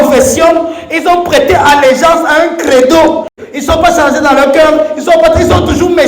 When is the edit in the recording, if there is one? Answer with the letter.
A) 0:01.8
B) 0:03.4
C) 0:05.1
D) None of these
B